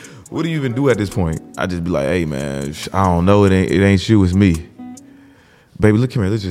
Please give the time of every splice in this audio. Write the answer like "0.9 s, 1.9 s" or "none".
1.5 s